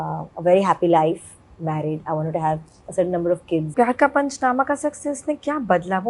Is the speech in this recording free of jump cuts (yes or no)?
no